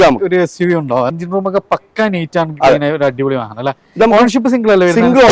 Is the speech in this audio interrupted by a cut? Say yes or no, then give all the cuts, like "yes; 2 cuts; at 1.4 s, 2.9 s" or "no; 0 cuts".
yes; 1 cut; at 1.1 s